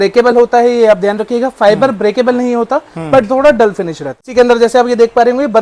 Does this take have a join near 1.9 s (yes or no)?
no